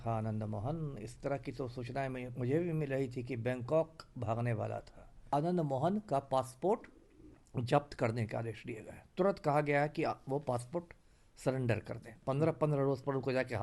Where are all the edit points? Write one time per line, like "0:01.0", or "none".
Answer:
0:05.2
0:12.2